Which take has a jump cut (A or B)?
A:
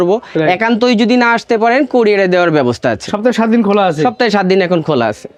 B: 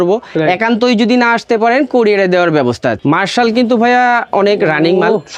B